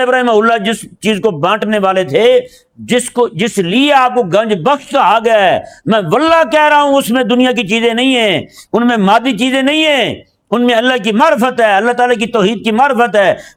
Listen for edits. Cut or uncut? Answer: uncut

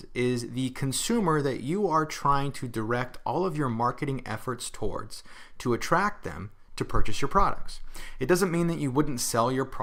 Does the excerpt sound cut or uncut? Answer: uncut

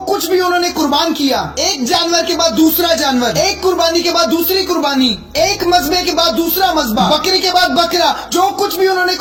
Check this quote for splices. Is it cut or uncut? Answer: uncut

